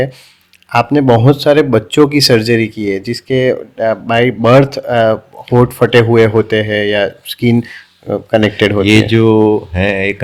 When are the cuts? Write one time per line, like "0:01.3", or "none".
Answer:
none